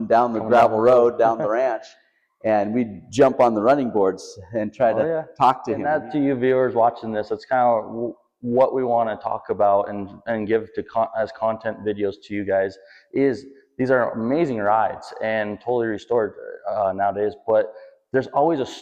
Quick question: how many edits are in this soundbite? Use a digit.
1